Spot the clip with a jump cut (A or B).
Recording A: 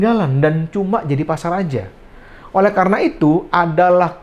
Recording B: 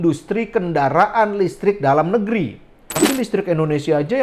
B